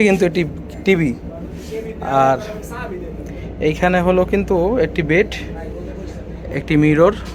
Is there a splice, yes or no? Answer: no